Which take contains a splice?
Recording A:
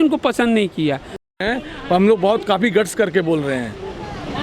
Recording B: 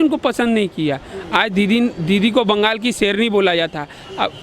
A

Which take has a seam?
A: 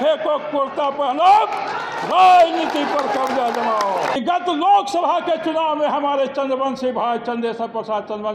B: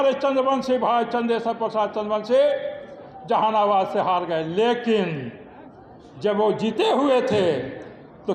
A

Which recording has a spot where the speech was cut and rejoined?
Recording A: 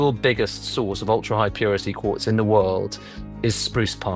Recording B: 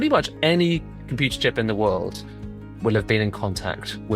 B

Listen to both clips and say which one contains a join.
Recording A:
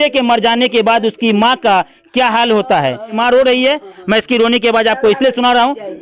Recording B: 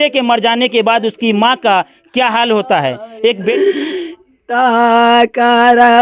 B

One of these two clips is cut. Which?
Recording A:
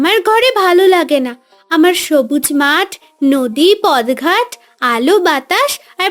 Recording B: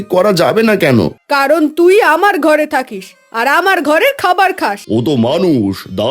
B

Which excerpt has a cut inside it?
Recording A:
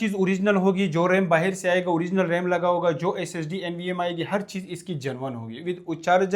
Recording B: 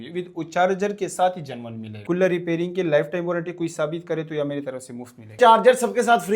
B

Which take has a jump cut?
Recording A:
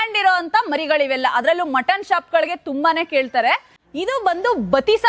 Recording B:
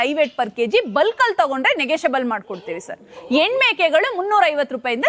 A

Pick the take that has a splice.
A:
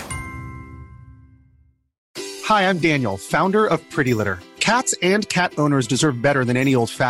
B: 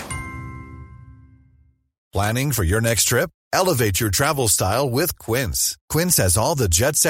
A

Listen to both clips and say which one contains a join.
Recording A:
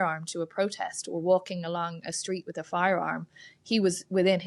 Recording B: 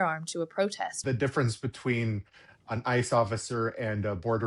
B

